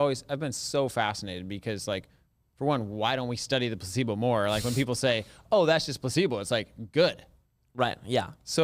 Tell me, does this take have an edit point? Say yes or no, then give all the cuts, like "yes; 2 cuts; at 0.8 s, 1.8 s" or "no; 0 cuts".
no; 0 cuts